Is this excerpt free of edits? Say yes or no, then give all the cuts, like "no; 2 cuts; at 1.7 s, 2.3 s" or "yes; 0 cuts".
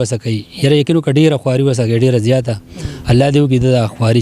yes; 0 cuts